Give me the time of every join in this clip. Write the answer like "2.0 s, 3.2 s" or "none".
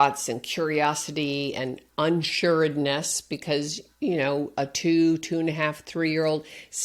none